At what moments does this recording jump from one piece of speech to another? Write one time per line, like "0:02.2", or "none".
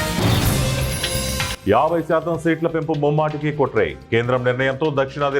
0:01.5